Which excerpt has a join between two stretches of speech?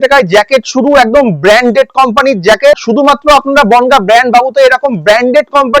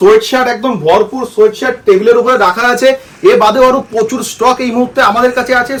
first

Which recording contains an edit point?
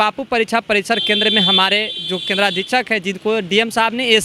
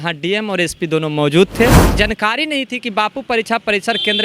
second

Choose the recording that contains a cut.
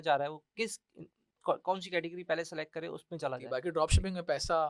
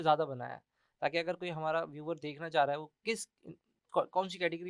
first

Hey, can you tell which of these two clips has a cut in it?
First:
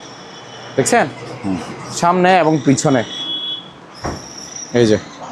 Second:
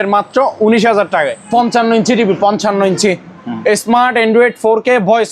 second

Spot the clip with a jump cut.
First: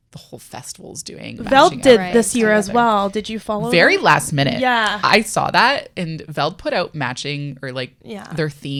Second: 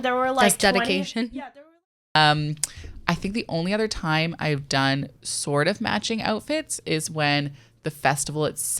second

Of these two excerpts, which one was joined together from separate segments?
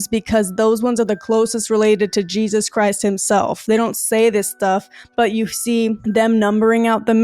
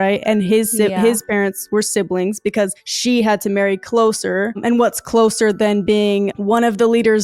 first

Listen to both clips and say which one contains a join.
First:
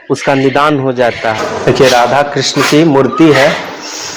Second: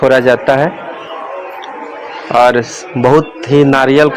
first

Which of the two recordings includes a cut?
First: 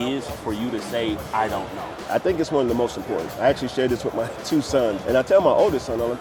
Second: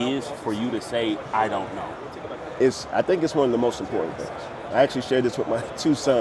first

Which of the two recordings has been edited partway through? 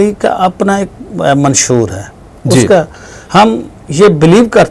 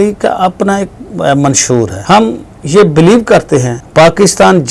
second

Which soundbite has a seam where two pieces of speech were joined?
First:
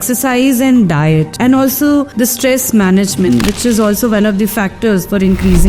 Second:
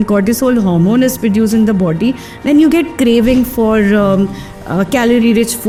first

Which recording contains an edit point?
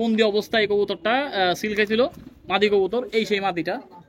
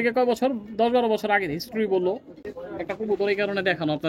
second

